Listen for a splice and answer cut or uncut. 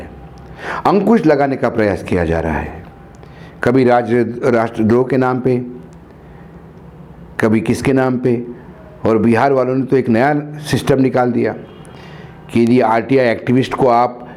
uncut